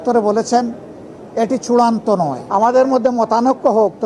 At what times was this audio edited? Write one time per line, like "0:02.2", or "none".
0:02.4